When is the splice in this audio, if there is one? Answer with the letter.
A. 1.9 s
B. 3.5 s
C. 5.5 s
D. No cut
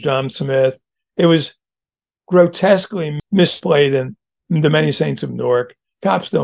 B